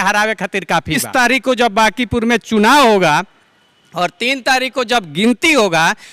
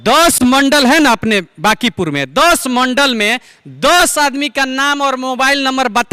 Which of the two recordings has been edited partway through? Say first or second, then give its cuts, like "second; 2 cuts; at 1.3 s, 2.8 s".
first; 1 cut; at 1.0 s